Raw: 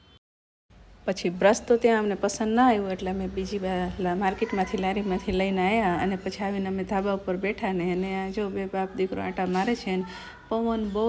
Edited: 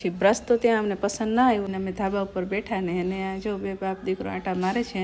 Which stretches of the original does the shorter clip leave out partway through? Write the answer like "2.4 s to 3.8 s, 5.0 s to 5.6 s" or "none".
2.9 s to 6.6 s